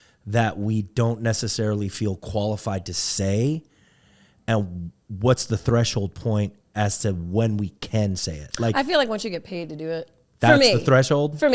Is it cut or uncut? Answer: cut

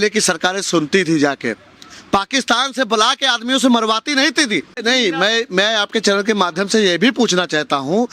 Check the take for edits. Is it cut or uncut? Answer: cut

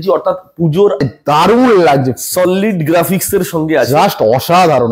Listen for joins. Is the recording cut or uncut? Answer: cut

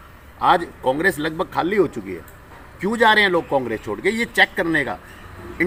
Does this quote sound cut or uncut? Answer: uncut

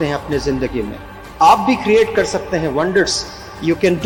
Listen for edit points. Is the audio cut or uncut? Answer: uncut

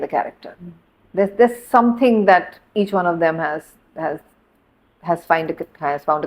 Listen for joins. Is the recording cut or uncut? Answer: uncut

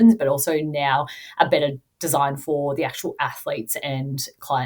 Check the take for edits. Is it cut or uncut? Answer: uncut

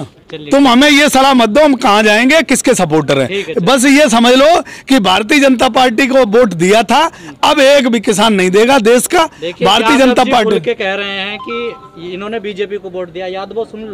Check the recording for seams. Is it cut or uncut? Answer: uncut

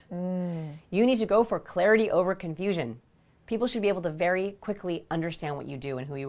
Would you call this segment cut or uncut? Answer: uncut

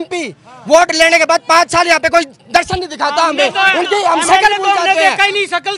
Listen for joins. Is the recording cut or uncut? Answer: uncut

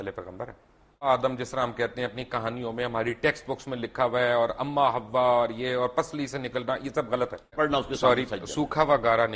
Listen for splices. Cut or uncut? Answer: cut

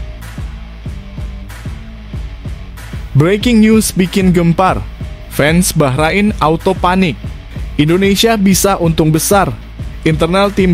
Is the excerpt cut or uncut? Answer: cut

